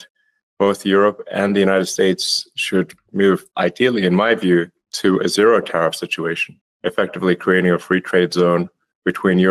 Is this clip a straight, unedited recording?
yes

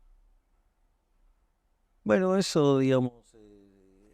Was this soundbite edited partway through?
no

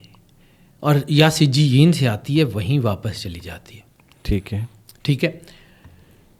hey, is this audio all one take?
yes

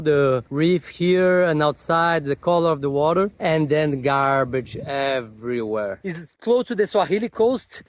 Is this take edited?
yes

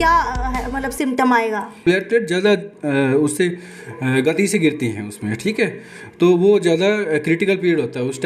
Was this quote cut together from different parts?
yes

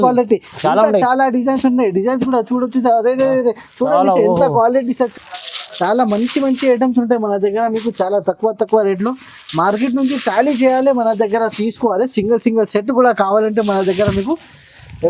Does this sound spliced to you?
yes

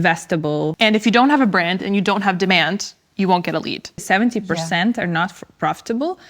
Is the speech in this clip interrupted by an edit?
yes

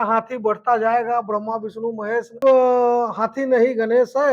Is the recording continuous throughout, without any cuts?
no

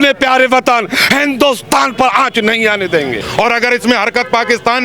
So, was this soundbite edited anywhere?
yes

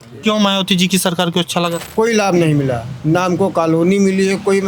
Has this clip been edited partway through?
yes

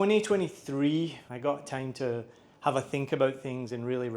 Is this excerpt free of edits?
no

